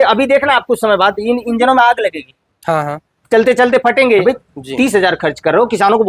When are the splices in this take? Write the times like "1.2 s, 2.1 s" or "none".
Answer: 4.2 s